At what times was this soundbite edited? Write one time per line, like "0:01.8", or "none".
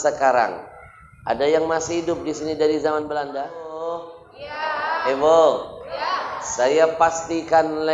0:03.7

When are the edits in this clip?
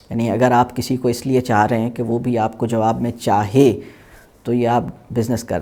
none

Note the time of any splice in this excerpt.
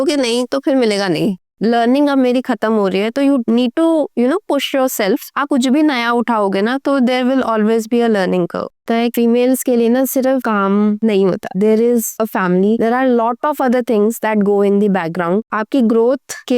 0:01.4
0:05.3
0:08.8
0:15.4

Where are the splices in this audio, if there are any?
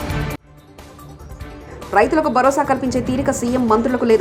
0:01.4

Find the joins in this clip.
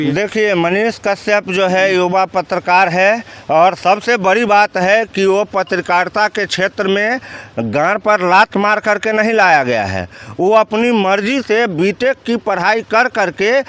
none

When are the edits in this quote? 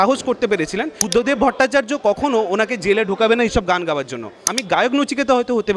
0:01.0
0:04.6

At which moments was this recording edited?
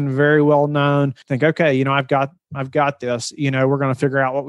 0:01.2

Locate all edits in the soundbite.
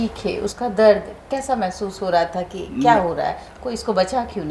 none

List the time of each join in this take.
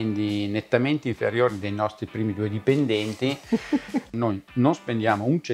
0:04.1

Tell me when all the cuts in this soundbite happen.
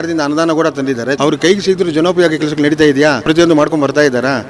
0:01.2
0:03.2

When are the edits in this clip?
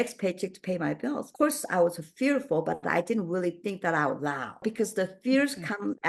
0:01.2
0:04.6

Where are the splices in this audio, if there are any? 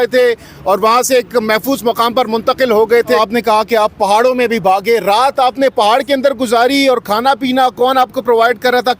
0:03.2

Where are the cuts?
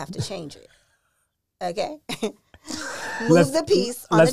none

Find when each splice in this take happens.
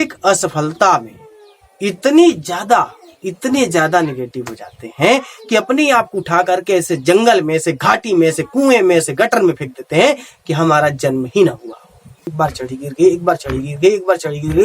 0:12.3

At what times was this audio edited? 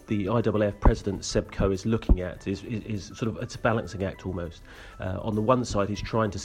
none

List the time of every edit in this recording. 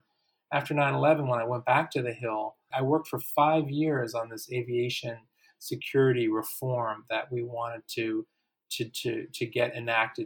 0:02.7

